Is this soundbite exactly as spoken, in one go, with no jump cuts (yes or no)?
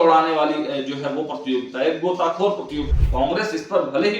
no